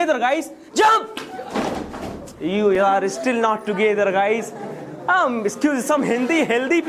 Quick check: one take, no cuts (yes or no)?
yes